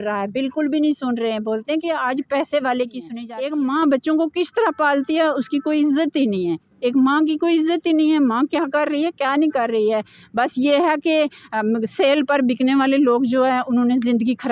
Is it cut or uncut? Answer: cut